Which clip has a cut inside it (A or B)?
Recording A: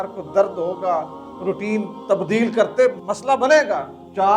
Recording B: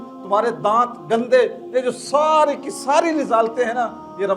A